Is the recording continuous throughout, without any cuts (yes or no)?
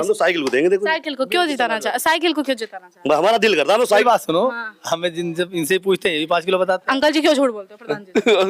no